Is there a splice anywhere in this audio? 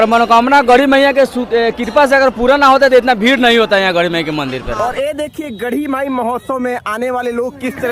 yes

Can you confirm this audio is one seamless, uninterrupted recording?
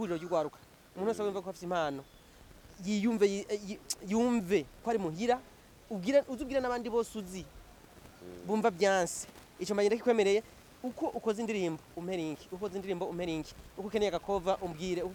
yes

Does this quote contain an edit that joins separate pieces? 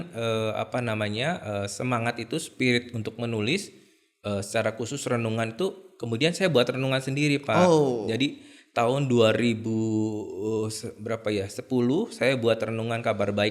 no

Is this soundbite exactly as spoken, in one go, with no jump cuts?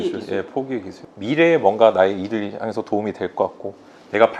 no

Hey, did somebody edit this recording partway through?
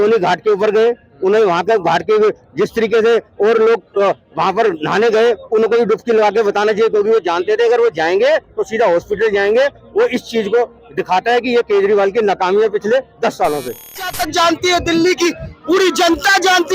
yes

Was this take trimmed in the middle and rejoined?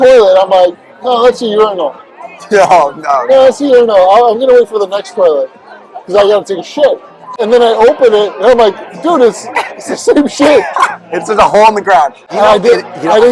yes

